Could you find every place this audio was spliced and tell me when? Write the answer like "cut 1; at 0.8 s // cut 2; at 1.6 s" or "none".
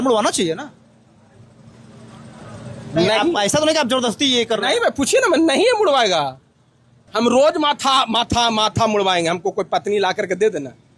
cut 1; at 7.1 s